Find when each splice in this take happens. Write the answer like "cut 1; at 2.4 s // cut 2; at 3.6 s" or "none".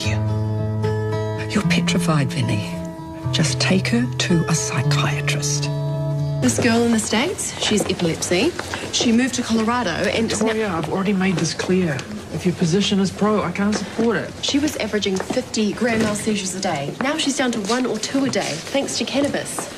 cut 1; at 14.2 s